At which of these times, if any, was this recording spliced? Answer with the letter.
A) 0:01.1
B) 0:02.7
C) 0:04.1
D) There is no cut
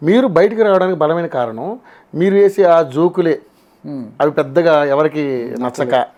D